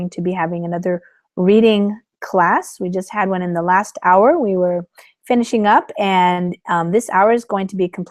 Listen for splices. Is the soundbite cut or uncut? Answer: uncut